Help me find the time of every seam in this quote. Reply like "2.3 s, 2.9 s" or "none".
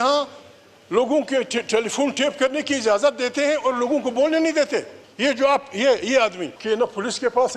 5.0 s, 6.5 s